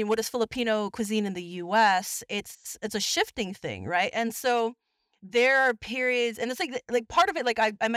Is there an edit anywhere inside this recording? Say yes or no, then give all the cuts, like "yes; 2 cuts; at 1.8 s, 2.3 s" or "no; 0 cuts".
no; 0 cuts